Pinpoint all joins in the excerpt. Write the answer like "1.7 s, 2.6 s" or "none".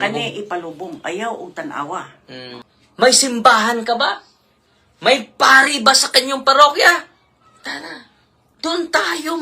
2.5 s